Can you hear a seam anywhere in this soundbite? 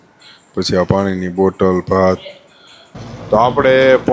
yes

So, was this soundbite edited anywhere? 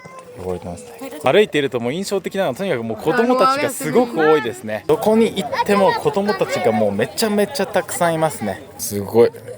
yes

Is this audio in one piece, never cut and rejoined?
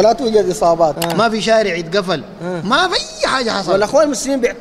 no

